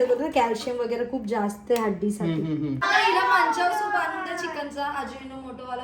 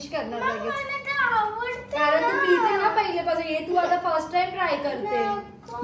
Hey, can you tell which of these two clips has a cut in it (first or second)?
first